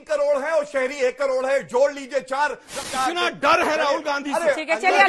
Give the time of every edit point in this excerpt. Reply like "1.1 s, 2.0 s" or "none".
2.7 s